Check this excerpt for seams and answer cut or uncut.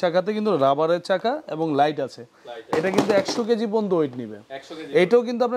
uncut